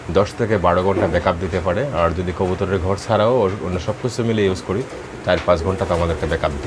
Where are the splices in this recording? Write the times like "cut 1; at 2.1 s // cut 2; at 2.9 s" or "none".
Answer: none